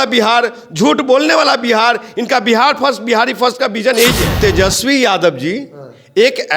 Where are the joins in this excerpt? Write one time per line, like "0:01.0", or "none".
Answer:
0:04.4

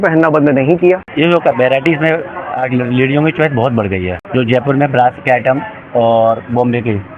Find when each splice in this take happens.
0:01.1
0:04.2

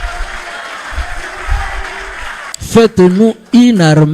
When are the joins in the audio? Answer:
0:02.4

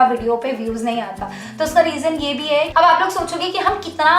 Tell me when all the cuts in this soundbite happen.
0:02.7

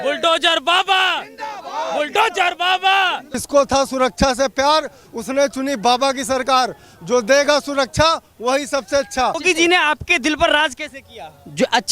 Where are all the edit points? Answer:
0:03.3
0:09.4

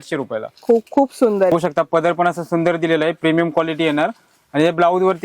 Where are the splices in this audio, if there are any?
0:01.5

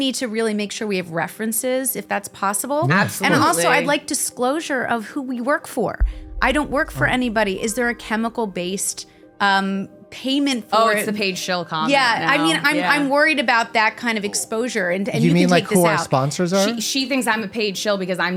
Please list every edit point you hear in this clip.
none

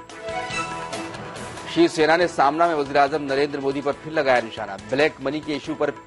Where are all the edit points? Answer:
0:01.7

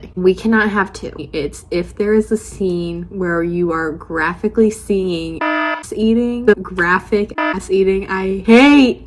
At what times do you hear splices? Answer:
0:01.2
0:06.6

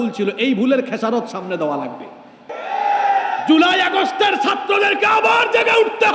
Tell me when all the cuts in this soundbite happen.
0:02.6

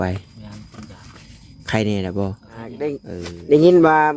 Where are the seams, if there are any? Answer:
0:03.1

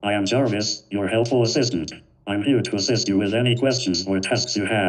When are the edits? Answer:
none

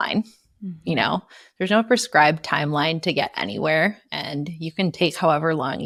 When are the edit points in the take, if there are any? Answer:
none

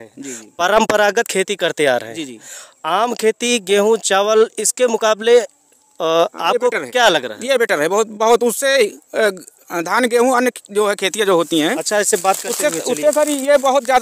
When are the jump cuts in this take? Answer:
none

